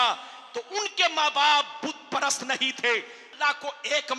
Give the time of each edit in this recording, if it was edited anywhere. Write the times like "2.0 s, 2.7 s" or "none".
3.2 s